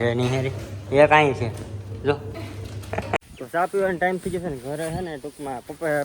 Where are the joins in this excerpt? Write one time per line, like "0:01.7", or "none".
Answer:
0:03.2